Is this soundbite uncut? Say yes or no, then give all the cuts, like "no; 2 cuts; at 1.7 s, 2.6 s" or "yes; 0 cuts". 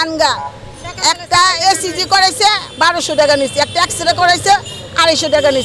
yes; 0 cuts